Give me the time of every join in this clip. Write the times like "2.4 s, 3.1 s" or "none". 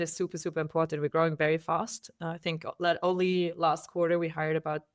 none